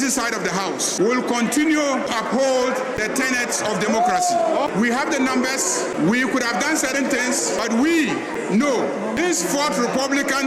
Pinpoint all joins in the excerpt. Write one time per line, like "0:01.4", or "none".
0:00.9
0:02.1
0:03.0
0:04.5
0:05.9
0:07.6
0:09.2